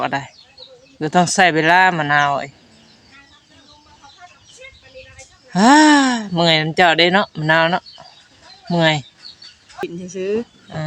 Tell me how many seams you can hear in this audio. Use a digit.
1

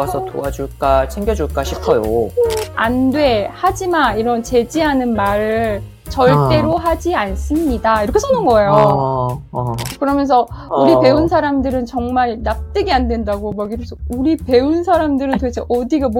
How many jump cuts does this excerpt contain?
2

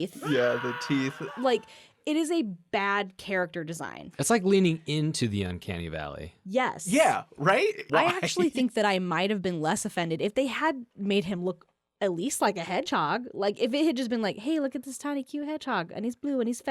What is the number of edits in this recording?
3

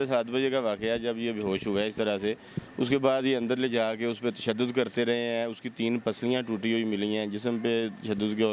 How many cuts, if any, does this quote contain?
0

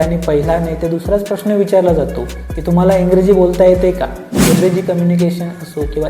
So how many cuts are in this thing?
1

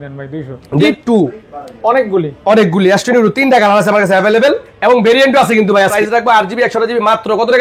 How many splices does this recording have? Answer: 2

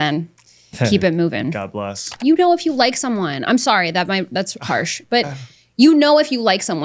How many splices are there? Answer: 1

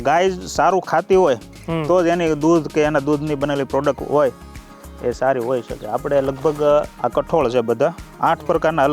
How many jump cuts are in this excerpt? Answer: 0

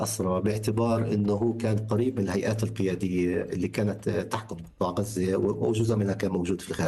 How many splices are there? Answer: 0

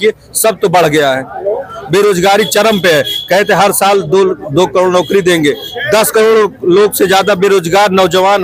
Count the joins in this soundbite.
0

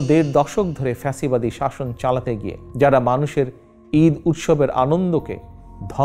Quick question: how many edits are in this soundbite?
1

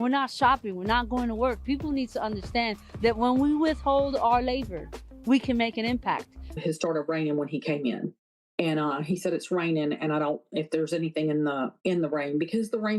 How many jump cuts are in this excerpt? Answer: 1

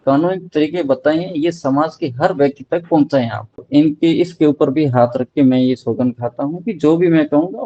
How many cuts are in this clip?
1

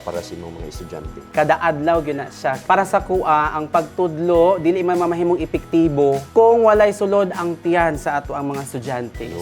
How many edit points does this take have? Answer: 3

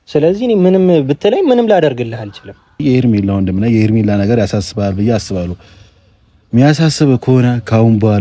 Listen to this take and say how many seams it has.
1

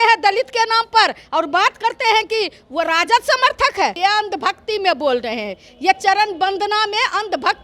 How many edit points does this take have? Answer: 1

